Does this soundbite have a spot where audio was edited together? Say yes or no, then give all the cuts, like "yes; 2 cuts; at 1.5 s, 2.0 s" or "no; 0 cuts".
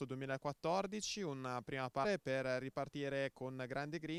no; 0 cuts